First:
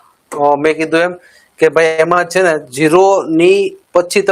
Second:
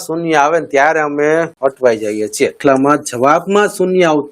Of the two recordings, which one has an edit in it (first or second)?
second